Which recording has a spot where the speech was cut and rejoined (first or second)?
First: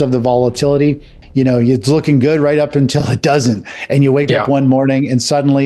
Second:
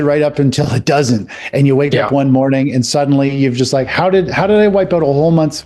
first